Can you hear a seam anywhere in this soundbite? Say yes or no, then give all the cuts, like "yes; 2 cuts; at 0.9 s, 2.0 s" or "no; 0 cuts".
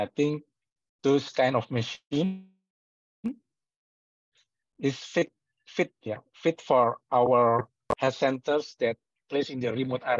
no; 0 cuts